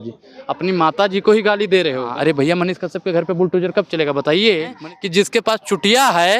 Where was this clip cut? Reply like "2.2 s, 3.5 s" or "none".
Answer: 2.1 s, 4.8 s